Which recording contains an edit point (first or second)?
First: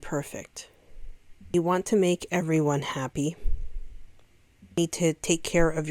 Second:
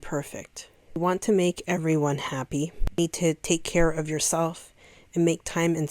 second